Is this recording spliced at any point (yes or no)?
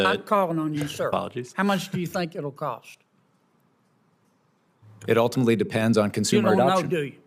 no